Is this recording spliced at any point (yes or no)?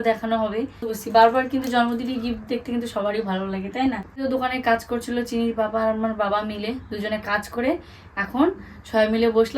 yes